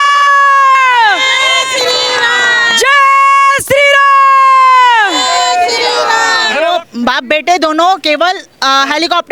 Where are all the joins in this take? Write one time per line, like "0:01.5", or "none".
0:06.7